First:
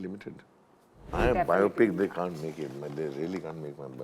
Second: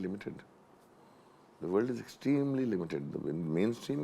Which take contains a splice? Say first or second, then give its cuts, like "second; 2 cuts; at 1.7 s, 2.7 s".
first; 1 cut; at 1.1 s